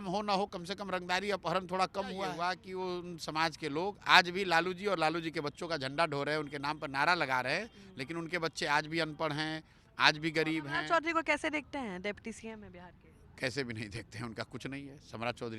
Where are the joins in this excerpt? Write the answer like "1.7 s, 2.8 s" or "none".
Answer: 2.5 s, 10.8 s